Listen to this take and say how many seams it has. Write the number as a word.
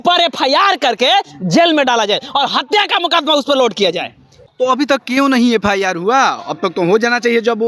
one